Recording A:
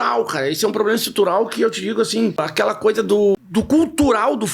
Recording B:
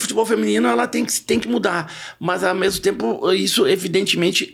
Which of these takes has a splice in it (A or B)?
A